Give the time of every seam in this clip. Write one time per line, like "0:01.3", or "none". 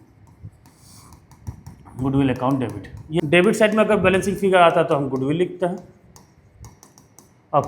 0:03.1